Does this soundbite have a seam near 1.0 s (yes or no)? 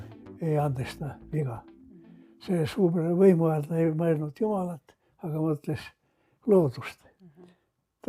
no